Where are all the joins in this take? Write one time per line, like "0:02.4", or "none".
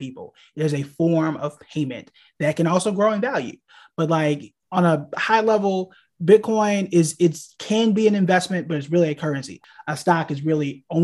0:04.5
0:09.6